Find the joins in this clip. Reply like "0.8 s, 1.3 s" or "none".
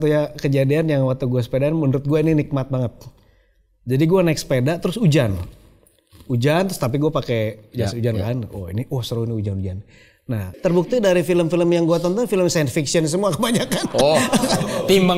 10.5 s